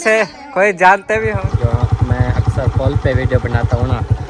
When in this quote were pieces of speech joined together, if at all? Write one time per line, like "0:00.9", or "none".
0:01.3